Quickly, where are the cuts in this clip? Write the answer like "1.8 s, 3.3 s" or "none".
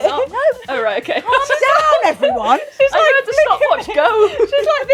none